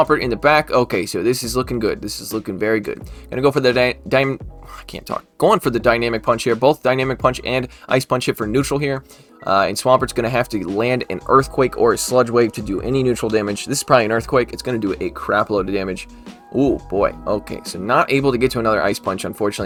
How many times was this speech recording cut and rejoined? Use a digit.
0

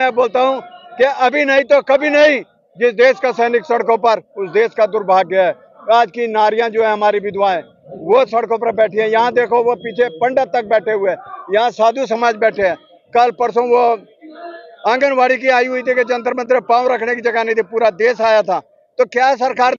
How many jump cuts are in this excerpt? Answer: 0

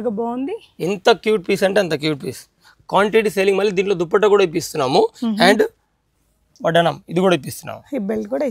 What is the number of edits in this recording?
0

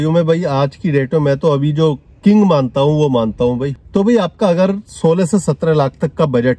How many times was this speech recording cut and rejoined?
1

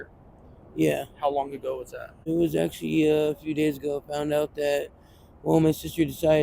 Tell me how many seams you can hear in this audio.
1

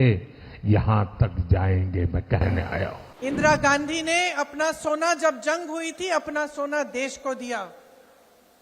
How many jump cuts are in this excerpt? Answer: 1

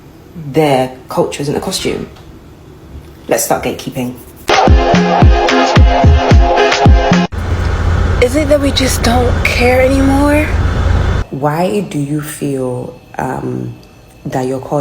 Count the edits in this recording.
1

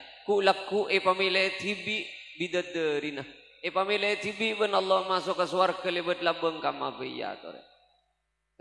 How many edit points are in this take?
0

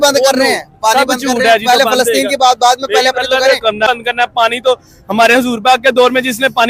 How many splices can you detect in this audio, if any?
1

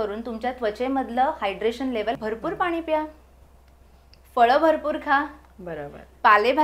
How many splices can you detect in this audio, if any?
1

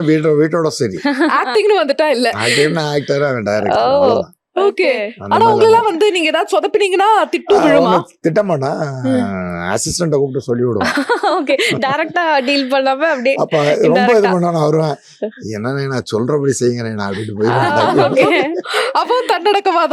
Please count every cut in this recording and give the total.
0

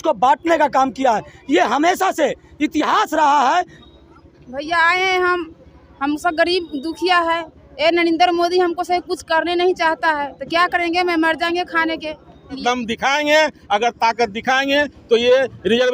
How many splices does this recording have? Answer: 2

